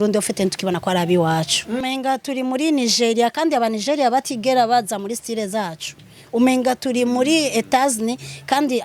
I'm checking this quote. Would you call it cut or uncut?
cut